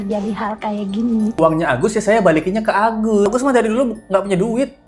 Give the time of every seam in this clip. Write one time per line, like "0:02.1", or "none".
0:01.4
0:03.3